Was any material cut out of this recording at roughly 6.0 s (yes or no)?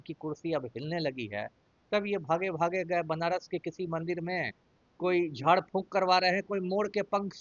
no